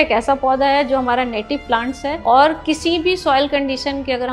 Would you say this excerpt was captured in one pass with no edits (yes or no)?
no